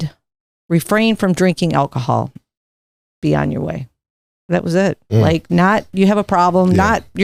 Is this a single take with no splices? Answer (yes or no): yes